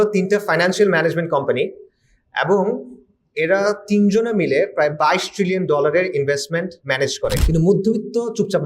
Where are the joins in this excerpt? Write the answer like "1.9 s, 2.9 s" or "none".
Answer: 7.4 s